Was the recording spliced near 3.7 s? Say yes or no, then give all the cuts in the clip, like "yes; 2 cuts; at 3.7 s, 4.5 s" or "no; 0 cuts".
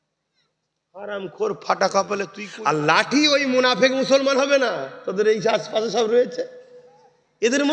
no; 1 cut; at 2.4 s